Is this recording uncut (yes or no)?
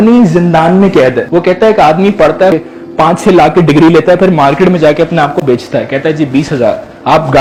yes